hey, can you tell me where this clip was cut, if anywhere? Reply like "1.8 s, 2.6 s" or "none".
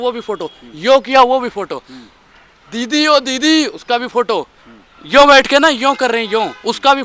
none